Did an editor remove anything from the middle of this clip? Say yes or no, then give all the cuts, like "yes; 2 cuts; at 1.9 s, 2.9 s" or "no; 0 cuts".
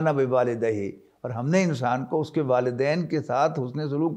no; 0 cuts